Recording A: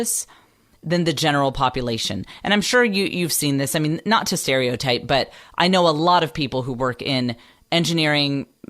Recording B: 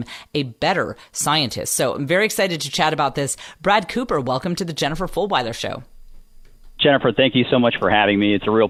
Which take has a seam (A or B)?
A